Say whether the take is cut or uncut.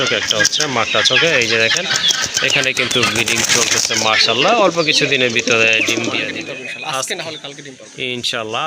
cut